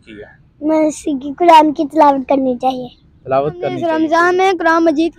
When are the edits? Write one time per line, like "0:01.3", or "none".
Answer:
0:03.8